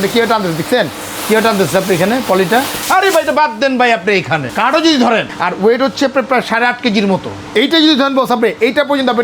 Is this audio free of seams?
no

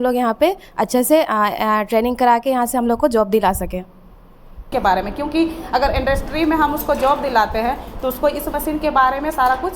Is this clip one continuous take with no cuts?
no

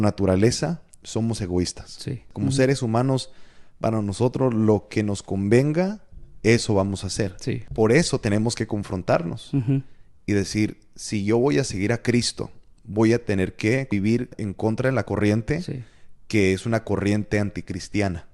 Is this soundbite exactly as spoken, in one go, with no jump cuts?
no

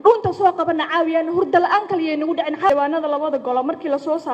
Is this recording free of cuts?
no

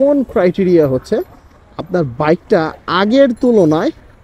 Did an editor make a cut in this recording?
no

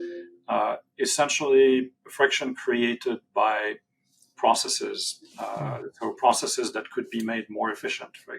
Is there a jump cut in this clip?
no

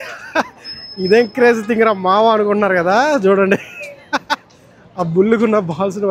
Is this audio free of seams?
yes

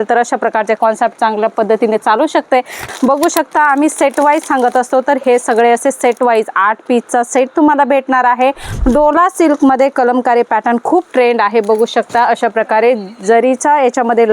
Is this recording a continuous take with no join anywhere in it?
no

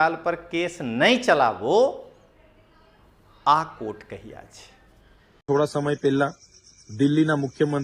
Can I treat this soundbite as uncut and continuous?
no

